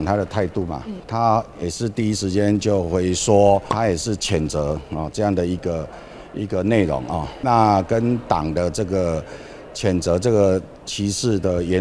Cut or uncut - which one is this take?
cut